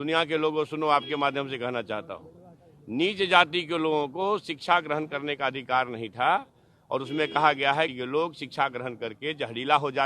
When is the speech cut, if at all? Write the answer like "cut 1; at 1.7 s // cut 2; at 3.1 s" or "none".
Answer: cut 1; at 7.9 s